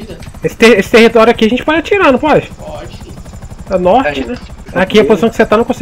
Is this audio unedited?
no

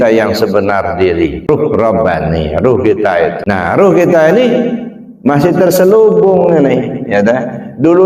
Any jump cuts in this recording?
yes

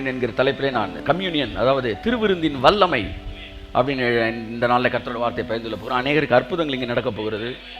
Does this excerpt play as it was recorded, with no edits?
no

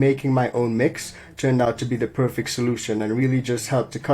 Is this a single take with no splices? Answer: yes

